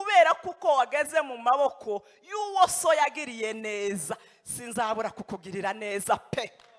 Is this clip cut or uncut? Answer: uncut